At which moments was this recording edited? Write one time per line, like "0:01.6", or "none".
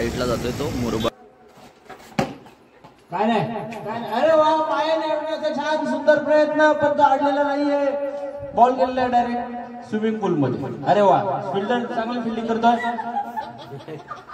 0:01.1